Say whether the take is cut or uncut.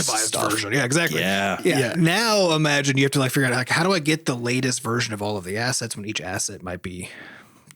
uncut